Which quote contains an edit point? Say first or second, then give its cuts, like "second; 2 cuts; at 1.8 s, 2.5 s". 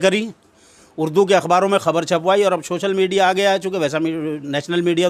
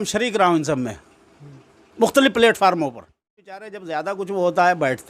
second; 1 cut; at 3.7 s